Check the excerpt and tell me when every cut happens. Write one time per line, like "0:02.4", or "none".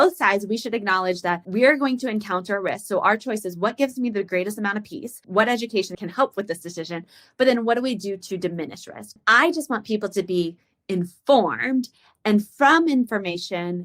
0:09.2

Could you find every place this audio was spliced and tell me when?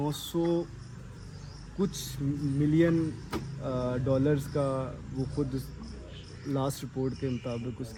none

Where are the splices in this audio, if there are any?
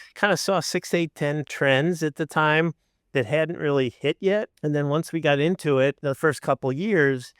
0:01.5
0:04.5
0:06.0

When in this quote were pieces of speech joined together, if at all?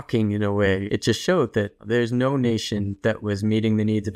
0:00.8
0:01.8

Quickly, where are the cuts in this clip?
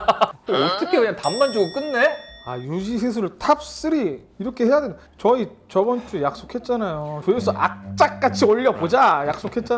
0:07.1

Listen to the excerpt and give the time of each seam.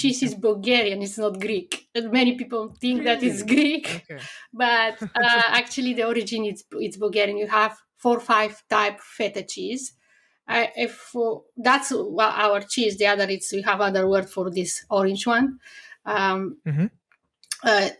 none

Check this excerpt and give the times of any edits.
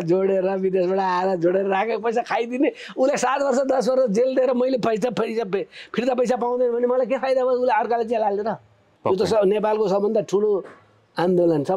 0:08.9

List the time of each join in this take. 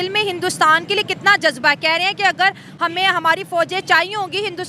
none

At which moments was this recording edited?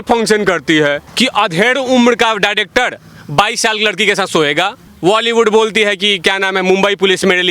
0:01.1
0:04.9

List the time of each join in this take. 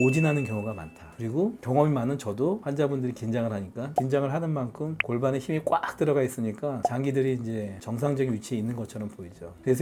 none

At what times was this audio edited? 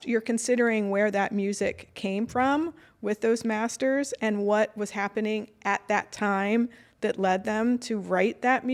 none

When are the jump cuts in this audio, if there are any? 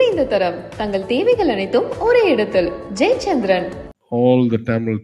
0:03.8

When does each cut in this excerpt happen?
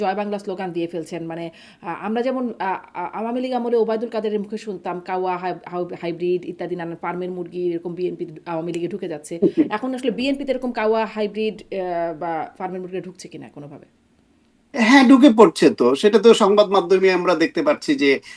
none

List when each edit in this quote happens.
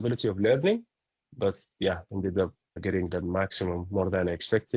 0:02.8

